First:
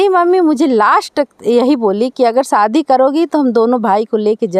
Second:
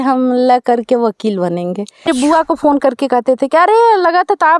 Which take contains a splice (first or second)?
second